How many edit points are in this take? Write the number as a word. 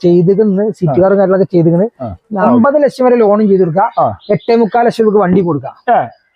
one